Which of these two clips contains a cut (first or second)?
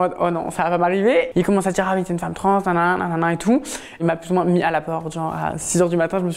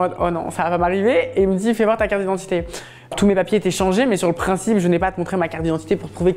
first